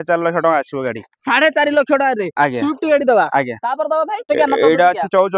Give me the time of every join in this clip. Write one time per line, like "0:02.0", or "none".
0:04.3